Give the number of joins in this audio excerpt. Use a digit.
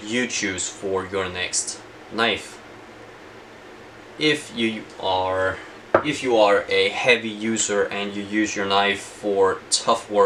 0